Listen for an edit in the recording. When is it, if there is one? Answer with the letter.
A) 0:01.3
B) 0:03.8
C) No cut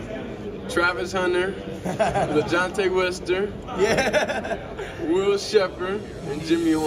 C